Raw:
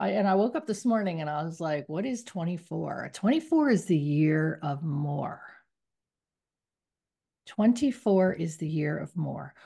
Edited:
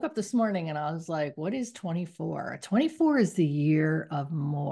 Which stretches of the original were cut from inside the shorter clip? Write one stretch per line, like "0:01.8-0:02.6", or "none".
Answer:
none